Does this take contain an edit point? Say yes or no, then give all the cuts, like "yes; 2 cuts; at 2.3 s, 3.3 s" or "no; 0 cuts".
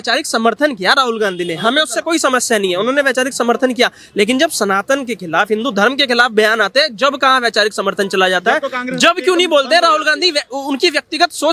no; 0 cuts